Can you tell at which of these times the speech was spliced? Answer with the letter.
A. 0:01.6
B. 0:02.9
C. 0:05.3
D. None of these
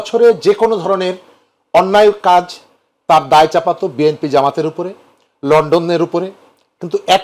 D